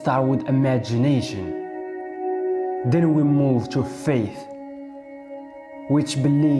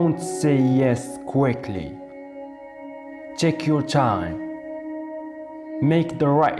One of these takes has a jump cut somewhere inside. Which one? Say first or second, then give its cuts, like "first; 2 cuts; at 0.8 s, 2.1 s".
first; 4 cuts; at 1.3 s, 2.9 s, 4.3 s, 5.8 s